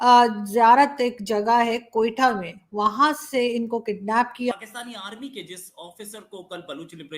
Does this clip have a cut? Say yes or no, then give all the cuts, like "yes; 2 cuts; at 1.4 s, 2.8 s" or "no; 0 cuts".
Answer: yes; 1 cut; at 4.5 s